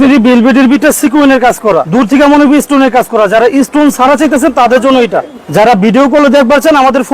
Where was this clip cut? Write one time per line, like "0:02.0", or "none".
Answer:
0:01.9
0:05.4